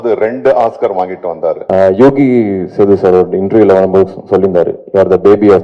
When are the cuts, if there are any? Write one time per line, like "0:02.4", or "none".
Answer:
0:01.6